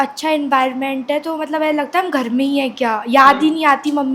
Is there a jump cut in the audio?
no; 0 cuts

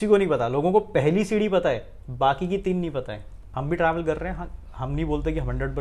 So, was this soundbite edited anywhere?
yes; 1 cut; at 3.4 s

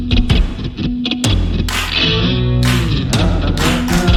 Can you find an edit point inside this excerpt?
no; 0 cuts

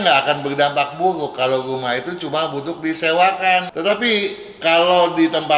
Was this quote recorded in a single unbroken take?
no; 1 cut; at 3.7 s

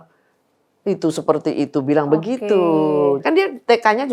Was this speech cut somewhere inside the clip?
no; 0 cuts

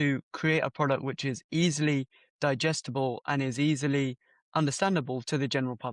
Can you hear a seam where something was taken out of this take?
no; 0 cuts

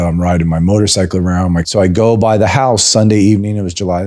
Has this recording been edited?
yes; 1 cut; at 1.7 s

